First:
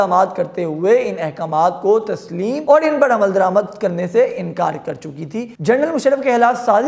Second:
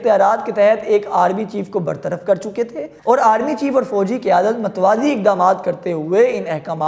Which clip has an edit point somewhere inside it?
first; 2 cuts; at 2.6 s, 5.5 s

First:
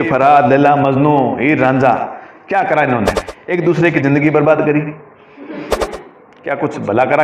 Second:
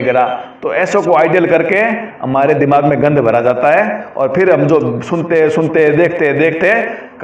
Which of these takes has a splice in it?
first; 2 cuts; at 3.3 s, 5.8 s

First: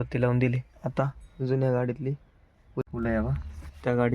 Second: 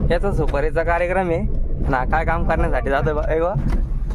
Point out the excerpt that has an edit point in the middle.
first; 1 cut; at 2.9 s

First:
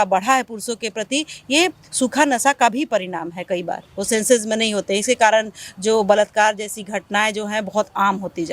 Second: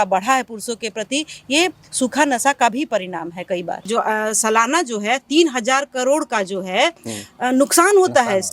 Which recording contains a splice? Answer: second; 1 cut; at 3.9 s

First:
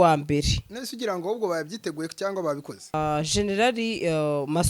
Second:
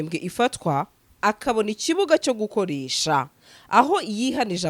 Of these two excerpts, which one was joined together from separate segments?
first; 1 cut; at 2.9 s

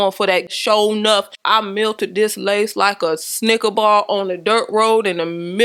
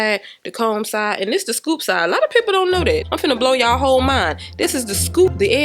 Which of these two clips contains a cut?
second; 1 cut; at 3.1 s

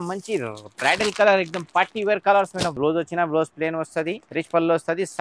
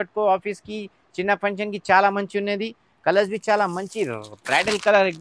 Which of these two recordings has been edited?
first; 2 cuts; at 2.8 s, 4.2 s

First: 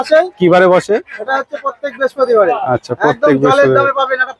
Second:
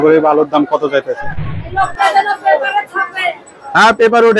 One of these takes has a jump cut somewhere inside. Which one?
second; 1 cut; at 1.6 s

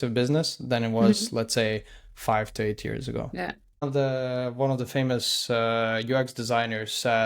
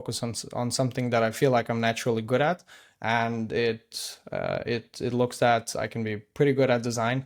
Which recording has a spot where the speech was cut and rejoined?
first; 1 cut; at 3.8 s

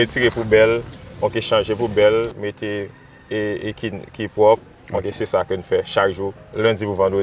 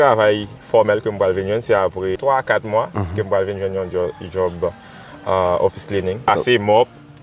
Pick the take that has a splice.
second; 2 cuts; at 2.2 s, 6.3 s

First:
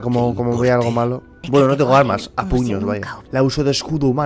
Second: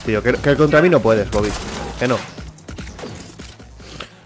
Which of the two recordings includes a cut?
first; 2 cuts; at 1.3 s, 3.2 s

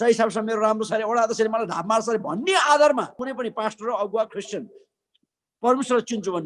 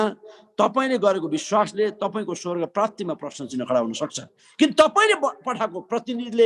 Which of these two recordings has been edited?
first; 1 cut; at 3.3 s

